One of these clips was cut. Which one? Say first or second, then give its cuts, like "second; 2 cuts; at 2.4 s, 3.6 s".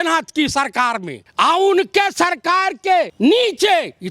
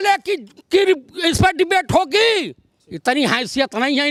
first; 2 cuts; at 1.2 s, 3.1 s